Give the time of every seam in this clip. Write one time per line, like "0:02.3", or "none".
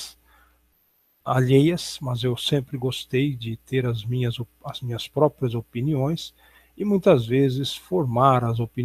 0:01.9

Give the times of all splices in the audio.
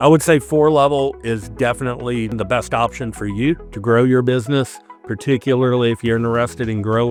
none

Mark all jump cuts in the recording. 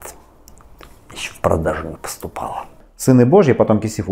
0:02.8

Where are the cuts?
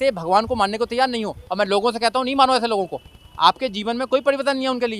none

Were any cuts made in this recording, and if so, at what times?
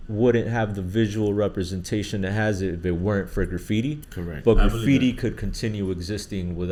none

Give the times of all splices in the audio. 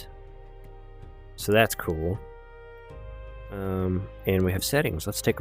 0:03.6

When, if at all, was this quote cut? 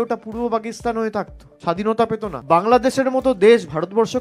0:02.4

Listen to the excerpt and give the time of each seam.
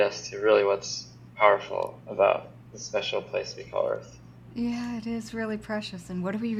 none

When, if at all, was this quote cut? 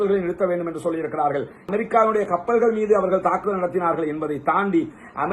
0:01.6

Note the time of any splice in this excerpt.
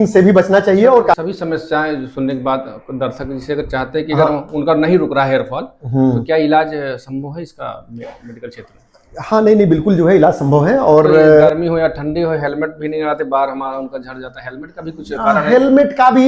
0:01.2
0:11.5

